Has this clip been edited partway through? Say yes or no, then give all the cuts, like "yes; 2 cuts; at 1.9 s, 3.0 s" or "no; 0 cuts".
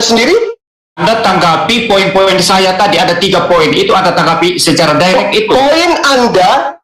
yes; 1 cut; at 1.0 s